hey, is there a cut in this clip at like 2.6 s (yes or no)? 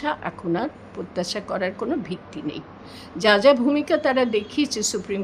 no